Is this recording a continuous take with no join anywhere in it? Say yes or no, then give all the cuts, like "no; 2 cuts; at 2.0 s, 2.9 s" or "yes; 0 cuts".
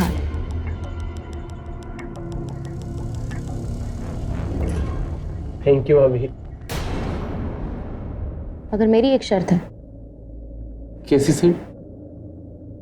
yes; 0 cuts